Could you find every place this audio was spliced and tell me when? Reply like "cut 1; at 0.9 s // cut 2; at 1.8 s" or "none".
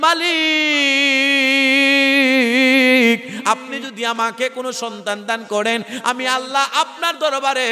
none